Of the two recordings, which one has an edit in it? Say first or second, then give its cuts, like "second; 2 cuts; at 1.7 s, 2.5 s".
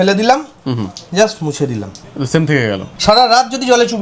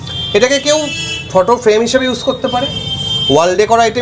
first; 2 cuts; at 2.0 s, 2.9 s